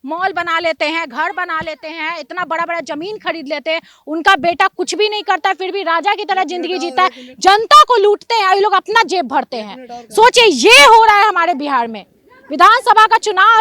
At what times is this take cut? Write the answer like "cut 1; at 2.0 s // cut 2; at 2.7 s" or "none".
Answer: none